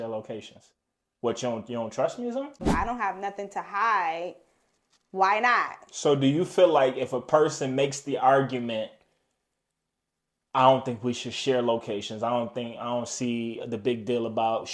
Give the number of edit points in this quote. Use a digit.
1